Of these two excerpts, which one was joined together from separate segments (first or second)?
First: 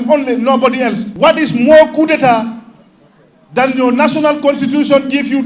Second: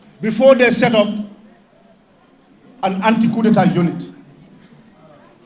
first